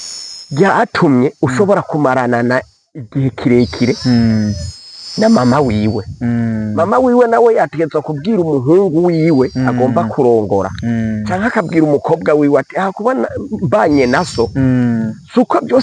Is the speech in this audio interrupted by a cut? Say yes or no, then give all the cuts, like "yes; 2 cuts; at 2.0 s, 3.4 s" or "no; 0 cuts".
no; 0 cuts